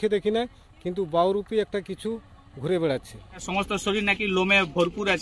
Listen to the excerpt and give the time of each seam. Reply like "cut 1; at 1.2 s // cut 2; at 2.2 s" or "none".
cut 1; at 3.5 s